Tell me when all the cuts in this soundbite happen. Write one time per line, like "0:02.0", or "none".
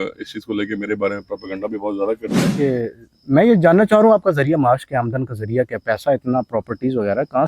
0:02.5